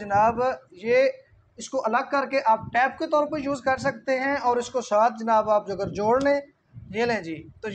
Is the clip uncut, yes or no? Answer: yes